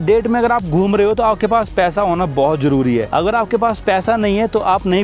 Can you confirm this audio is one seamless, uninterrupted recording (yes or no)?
yes